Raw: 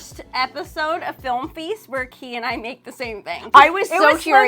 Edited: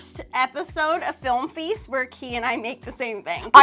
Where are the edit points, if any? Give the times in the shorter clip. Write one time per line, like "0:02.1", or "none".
none